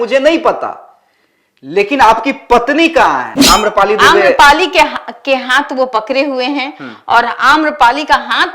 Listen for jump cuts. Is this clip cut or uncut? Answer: cut